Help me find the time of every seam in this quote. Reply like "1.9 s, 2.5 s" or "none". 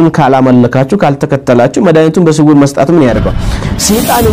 3.4 s